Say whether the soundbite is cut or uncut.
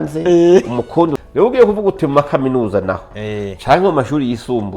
cut